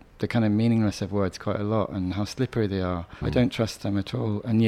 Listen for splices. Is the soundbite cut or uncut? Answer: cut